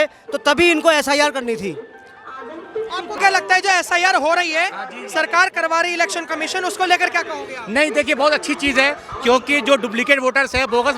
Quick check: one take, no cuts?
no; 1 cut; at 3.2 s

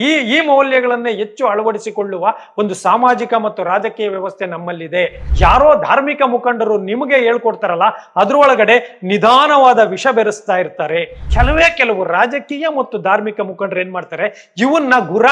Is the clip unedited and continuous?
no; 2 cuts; at 5.2 s, 11.3 s

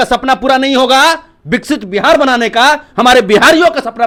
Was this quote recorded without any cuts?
yes; 0 cuts

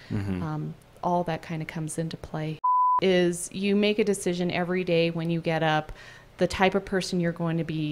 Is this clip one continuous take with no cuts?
no; 1 cut; at 3.0 s

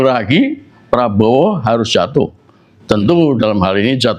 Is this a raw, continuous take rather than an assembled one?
yes; 0 cuts

